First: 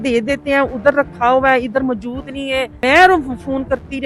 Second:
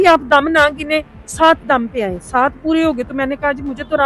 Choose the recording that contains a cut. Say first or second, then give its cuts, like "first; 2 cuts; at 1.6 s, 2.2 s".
first; 1 cut; at 2.8 s